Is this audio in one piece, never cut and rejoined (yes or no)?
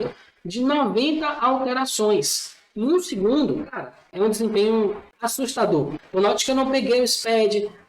no